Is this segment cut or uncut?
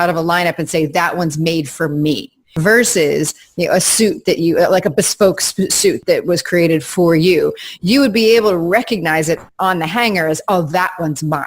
cut